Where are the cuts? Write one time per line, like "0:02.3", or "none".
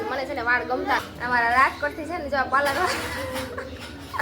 0:01.0

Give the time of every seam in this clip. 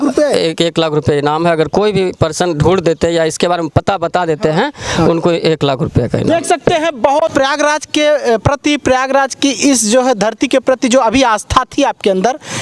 0:07.3

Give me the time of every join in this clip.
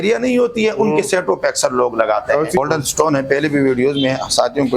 0:02.6

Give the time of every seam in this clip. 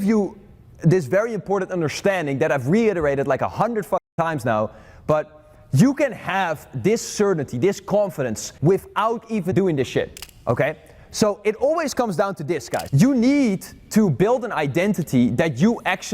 0:08.5
0:09.5
0:10.2
0:12.8

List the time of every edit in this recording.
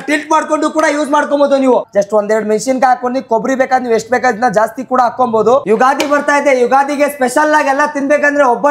0:01.9
0:05.6

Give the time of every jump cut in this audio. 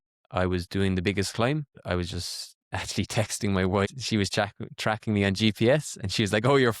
0:01.8
0:03.9

